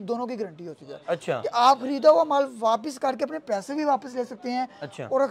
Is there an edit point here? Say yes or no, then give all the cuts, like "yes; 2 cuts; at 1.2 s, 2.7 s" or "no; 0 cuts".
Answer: no; 0 cuts